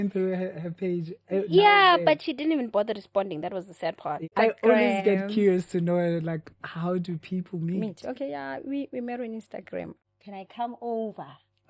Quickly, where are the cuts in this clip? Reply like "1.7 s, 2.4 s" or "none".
4.3 s, 10.0 s